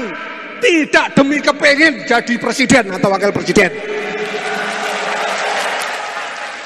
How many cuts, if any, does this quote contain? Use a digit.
0